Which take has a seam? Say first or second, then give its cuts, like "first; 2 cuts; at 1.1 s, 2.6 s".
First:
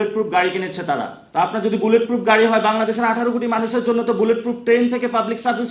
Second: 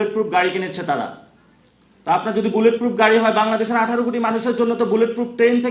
first; 1 cut; at 1.2 s